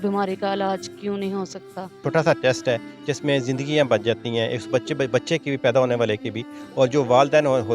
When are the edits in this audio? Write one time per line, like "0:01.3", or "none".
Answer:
0:02.0